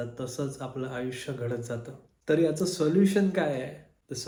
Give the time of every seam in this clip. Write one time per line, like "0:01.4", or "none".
none